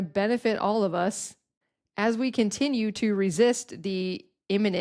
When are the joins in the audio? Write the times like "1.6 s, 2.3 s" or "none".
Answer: none